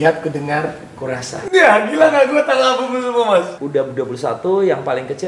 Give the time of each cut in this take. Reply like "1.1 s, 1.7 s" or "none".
3.5 s